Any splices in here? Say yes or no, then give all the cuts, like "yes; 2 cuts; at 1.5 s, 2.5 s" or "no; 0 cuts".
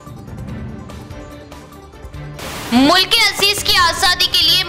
yes; 1 cut; at 1.0 s